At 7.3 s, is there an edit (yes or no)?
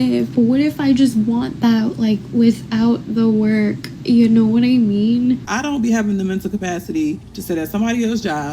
no